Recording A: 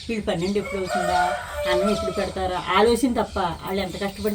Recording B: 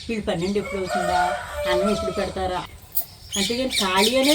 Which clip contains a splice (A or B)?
B